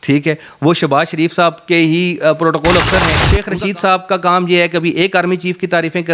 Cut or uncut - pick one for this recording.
cut